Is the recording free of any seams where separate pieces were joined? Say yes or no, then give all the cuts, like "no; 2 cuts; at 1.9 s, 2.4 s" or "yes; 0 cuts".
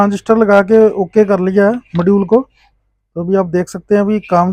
yes; 0 cuts